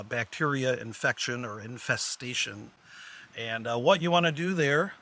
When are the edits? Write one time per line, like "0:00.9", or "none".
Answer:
none